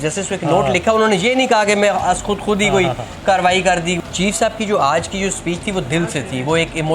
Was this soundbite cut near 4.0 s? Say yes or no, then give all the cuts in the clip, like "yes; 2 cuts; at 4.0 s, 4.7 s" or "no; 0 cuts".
yes; 1 cut; at 4.0 s